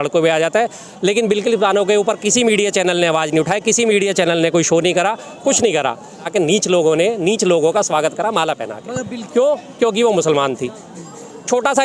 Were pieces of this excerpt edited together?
yes; 2 cuts; at 6.3 s, 9.1 s

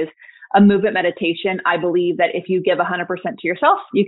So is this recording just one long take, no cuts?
yes; 0 cuts

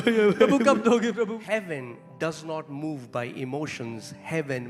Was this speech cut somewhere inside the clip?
yes; 1 cut; at 1.4 s

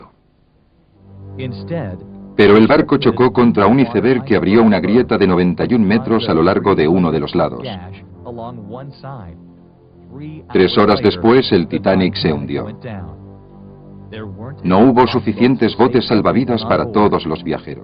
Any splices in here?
no; 0 cuts

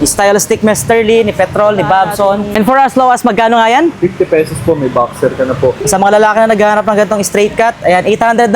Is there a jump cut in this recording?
yes; 2 cuts; at 2.5 s, 5.8 s

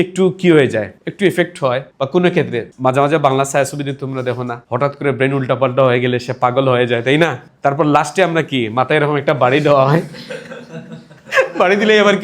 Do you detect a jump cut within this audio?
no; 0 cuts

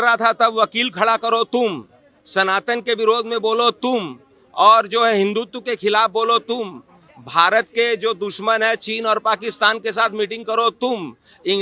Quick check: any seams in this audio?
no; 0 cuts

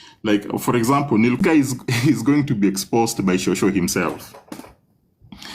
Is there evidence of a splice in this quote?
yes; 1 cut; at 1.4 s

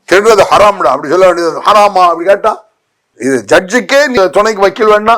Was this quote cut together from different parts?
yes; 1 cut; at 4.2 s

